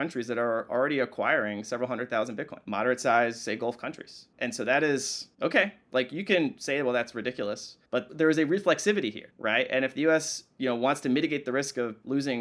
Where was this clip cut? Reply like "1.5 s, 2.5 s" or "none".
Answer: none